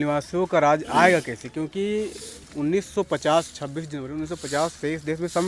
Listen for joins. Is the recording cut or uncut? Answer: uncut